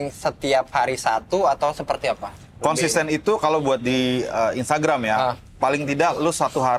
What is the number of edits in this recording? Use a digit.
0